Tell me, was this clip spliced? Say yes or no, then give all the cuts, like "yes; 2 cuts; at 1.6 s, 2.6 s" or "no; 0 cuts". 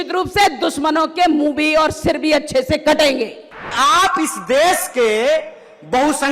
yes; 1 cut; at 3.7 s